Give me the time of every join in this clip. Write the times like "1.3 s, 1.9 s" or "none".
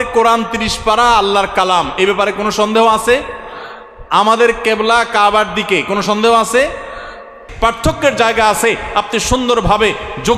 7.4 s